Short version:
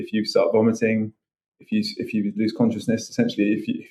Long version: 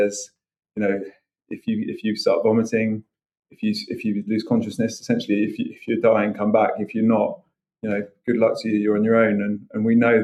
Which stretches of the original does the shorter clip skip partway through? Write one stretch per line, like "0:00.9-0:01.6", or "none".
none